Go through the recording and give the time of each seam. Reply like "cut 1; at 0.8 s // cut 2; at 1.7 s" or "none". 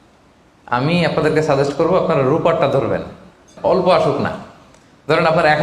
cut 1; at 3.5 s